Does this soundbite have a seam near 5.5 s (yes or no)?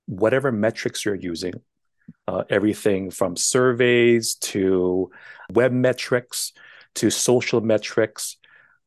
yes